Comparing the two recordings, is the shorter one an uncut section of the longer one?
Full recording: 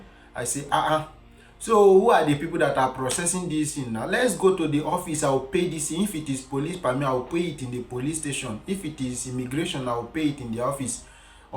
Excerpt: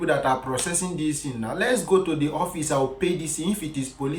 yes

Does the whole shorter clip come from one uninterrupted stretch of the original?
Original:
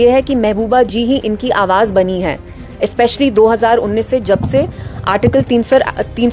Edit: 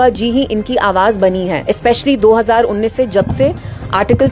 no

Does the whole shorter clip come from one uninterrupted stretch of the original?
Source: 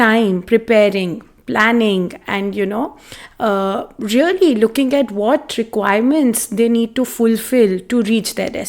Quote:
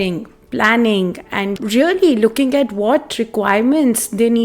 no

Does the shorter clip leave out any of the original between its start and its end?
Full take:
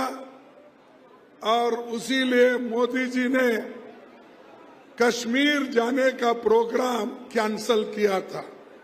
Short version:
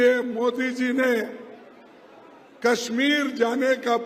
no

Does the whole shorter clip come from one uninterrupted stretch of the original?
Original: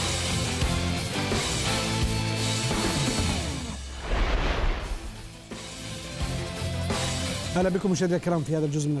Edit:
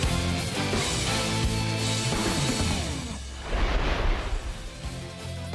no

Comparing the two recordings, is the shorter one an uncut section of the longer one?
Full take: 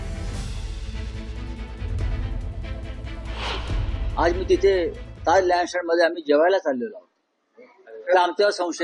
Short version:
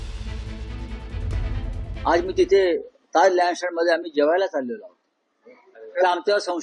no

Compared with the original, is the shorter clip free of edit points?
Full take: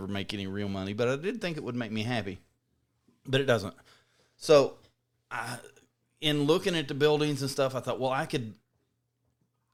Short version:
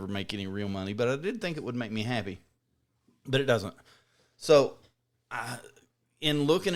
yes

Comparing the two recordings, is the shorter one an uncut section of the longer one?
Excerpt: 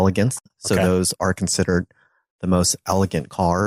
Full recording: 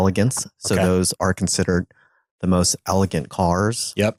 yes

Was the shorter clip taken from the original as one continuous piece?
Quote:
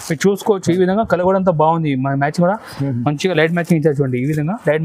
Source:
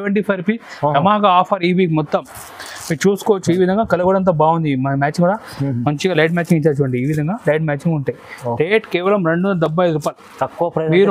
yes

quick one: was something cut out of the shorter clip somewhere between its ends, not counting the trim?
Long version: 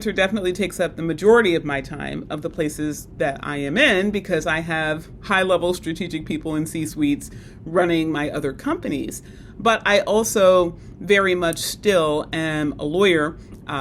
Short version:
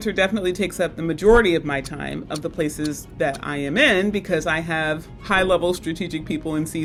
no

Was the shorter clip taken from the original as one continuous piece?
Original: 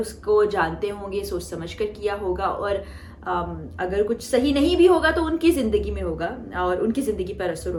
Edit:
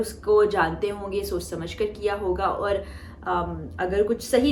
yes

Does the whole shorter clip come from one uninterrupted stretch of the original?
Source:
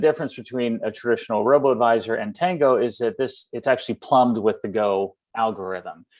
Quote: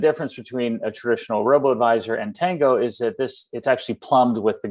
yes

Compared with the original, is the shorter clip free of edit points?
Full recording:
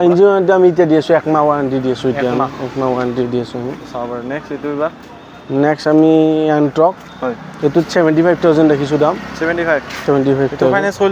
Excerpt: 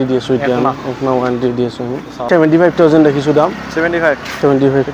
no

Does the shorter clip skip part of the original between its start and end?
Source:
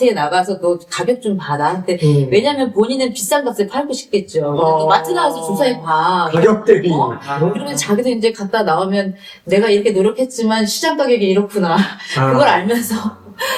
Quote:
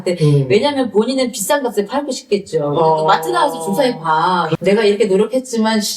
yes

